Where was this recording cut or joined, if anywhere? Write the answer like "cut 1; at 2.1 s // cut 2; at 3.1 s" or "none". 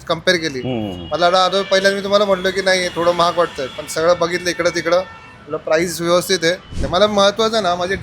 cut 1; at 6.8 s